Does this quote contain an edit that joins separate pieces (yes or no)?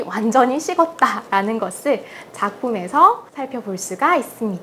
yes